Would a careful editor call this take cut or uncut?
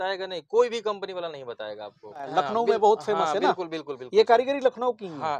cut